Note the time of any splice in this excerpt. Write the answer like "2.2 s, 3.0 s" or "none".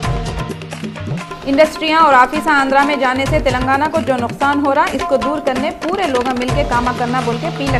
1.0 s